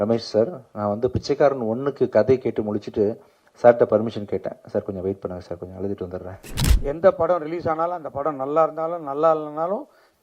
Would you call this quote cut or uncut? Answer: cut